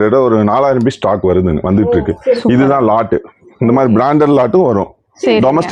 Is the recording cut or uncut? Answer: uncut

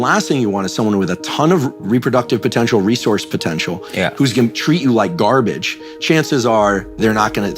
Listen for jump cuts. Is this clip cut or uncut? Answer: uncut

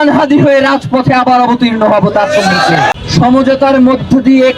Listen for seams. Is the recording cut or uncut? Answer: cut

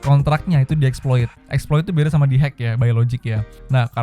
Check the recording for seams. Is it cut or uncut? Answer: uncut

